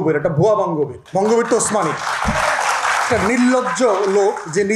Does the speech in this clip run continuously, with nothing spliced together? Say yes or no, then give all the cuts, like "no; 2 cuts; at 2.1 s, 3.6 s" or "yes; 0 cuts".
no; 1 cut; at 1.0 s